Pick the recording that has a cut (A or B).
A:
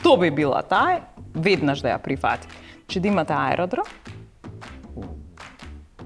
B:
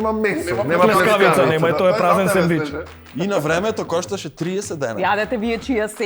B